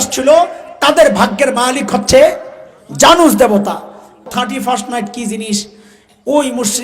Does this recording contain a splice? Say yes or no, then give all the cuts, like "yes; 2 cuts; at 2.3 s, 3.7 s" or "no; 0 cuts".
yes; 1 cut; at 4.2 s